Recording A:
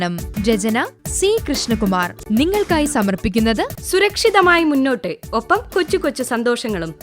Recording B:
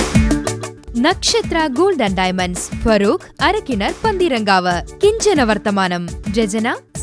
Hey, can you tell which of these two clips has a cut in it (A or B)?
A